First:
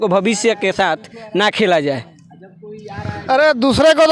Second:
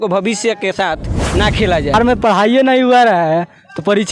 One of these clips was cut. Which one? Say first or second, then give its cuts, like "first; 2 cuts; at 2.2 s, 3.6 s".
second; 1 cut; at 1.9 s